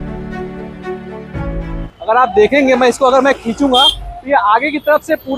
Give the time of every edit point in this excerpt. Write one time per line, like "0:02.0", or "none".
0:01.9